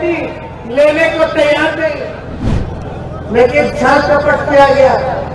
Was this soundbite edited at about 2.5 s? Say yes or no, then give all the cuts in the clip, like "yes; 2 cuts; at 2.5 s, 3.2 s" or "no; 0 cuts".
yes; 1 cut; at 2.5 s